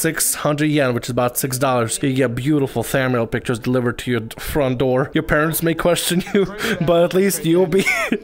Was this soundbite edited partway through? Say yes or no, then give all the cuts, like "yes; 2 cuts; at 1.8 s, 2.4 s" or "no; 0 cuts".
yes; 2 cuts; at 1.9 s, 5.1 s